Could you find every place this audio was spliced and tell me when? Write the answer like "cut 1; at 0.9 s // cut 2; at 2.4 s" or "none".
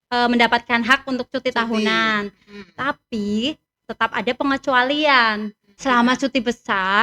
cut 1; at 5.7 s